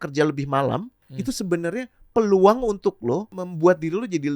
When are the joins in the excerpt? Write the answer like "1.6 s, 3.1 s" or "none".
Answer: 1.0 s, 3.4 s